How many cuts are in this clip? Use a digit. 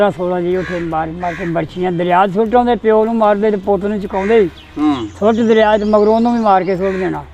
0